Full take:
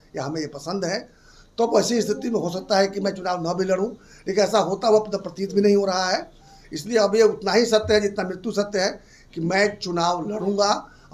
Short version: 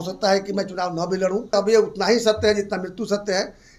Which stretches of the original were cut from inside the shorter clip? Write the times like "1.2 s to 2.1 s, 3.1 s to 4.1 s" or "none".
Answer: 4.0 s to 7.0 s